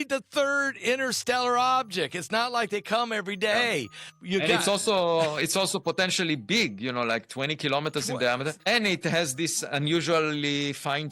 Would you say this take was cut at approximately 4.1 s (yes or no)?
yes